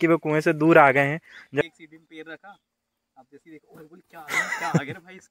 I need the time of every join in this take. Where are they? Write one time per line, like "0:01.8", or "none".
0:01.6